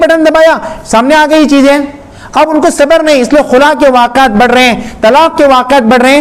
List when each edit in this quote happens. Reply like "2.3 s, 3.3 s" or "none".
none